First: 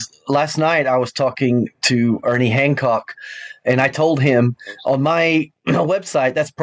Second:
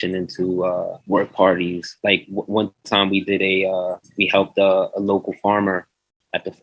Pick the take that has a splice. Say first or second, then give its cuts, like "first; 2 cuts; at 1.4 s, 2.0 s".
second; 1 cut; at 1.0 s